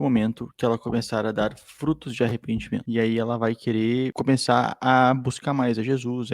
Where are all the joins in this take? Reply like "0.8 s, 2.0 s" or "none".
2.8 s